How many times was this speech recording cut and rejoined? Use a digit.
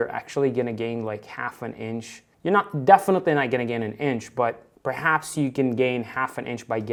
0